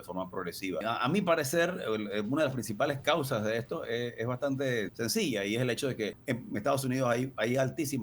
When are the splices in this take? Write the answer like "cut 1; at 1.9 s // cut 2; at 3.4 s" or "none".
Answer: cut 1; at 0.8 s // cut 2; at 4.9 s // cut 3; at 6.2 s